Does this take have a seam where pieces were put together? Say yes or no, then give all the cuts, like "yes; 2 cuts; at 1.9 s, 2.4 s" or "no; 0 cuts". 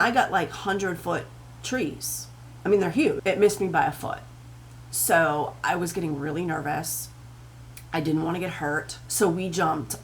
yes; 2 cuts; at 3.2 s, 9.0 s